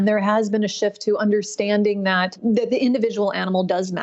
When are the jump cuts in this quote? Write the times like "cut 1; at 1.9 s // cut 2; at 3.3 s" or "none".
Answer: cut 1; at 2.4 s

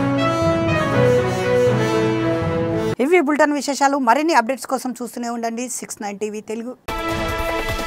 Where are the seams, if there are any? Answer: none

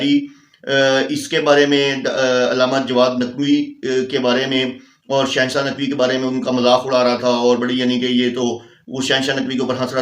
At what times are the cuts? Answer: none

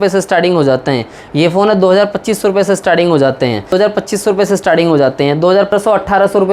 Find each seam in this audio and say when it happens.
cut 1; at 3.7 s // cut 2; at 5.7 s

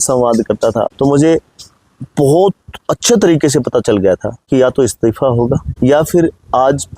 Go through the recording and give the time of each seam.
cut 1; at 0.9 s // cut 2; at 4.3 s // cut 3; at 5.7 s

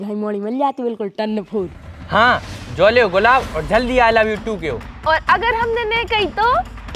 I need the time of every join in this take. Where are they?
cut 1; at 2.0 s // cut 2; at 4.9 s

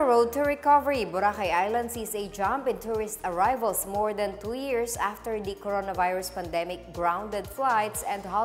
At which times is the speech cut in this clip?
none

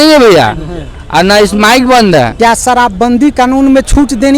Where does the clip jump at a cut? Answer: cut 1; at 2.3 s

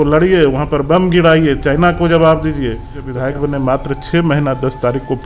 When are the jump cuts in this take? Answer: cut 1; at 3.0 s

